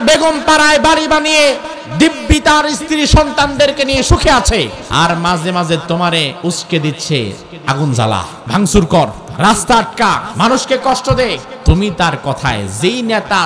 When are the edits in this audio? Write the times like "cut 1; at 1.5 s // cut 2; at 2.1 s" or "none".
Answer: cut 1; at 4.8 s // cut 2; at 6.3 s // cut 3; at 8.4 s // cut 4; at 9.2 s // cut 5; at 10.3 s // cut 6; at 11.5 s